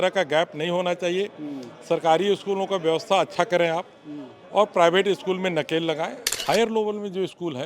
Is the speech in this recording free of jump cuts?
no; 1 cut; at 6.3 s

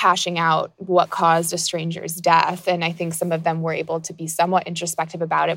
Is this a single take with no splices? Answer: yes; 0 cuts

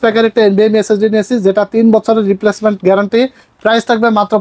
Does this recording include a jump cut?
no; 0 cuts

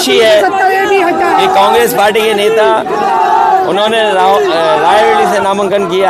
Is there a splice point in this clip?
no; 0 cuts

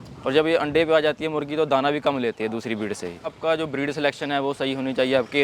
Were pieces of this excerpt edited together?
yes; 1 cut; at 3.4 s

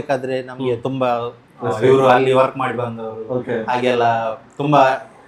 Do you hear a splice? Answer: no; 0 cuts

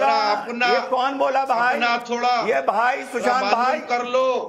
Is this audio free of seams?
yes; 0 cuts

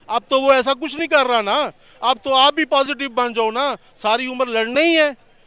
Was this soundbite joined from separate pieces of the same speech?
no; 0 cuts

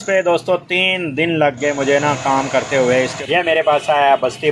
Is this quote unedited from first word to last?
no; 1 cut; at 3.1 s

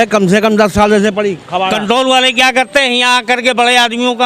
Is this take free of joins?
no; 1 cut; at 1.8 s

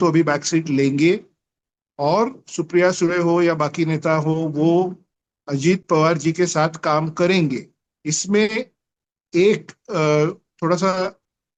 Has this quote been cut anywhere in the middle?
no; 0 cuts

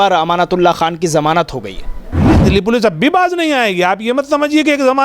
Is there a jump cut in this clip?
yes; 1 cut; at 2.3 s

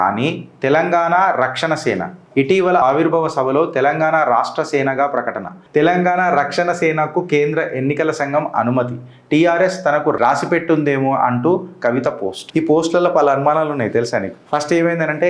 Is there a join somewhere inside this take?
yes; 1 cut; at 2.8 s

